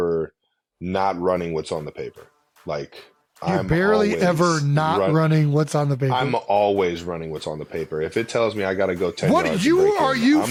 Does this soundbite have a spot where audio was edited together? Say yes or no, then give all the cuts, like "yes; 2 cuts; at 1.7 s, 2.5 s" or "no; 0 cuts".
no; 0 cuts